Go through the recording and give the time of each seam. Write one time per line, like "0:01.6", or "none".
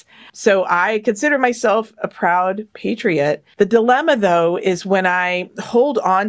none